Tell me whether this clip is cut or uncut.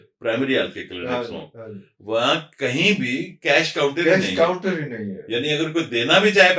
uncut